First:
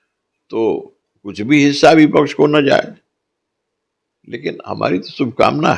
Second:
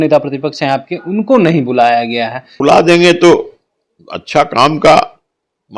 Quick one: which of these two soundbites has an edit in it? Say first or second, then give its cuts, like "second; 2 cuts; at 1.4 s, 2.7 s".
second; 1 cut; at 2.4 s